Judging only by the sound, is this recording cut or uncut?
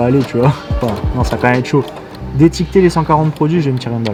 uncut